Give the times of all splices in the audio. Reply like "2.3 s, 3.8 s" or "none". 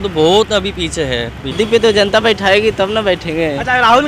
1.5 s